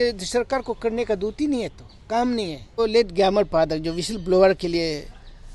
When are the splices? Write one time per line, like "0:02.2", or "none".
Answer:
0:02.8